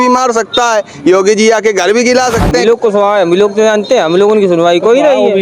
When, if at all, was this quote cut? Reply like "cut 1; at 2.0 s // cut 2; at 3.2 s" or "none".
cut 1; at 2.6 s